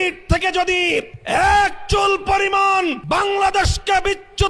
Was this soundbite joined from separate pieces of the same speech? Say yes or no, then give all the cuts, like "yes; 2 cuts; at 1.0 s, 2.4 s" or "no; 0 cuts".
yes; 2 cuts; at 1.2 s, 3.0 s